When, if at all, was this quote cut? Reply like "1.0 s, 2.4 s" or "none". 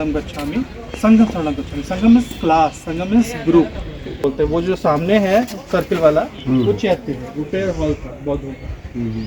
4.2 s